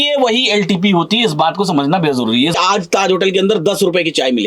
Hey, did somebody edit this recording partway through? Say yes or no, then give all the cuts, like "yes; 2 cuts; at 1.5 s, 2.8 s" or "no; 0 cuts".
yes; 1 cut; at 2.6 s